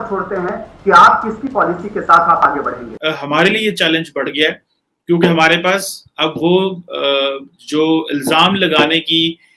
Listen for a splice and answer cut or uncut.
cut